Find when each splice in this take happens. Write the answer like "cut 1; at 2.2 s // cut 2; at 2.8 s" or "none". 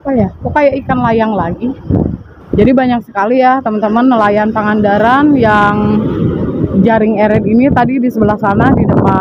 cut 1; at 2.4 s

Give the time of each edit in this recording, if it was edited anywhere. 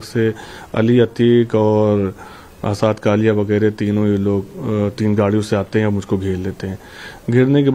none

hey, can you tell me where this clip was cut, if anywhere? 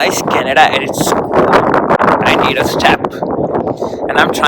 none

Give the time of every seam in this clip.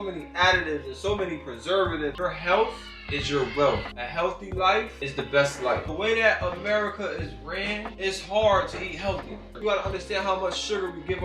cut 1; at 2.2 s // cut 2; at 5.9 s // cut 3; at 9.5 s

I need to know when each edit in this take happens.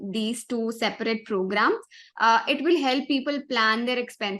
none

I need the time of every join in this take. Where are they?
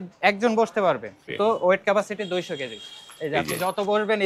cut 1; at 1.3 s

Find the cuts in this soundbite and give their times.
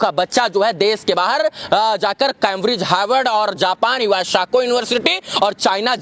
none

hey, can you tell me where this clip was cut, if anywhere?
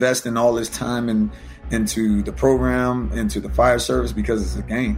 none

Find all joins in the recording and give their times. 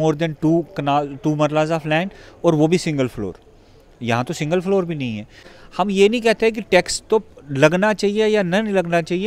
cut 1; at 5.5 s

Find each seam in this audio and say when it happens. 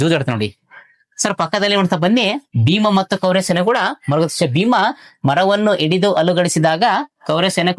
none

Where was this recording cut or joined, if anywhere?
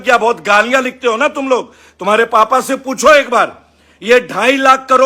none

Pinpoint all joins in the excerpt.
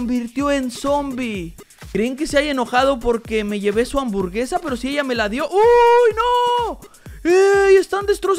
cut 1; at 1.7 s

